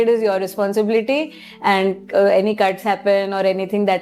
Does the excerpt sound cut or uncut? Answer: uncut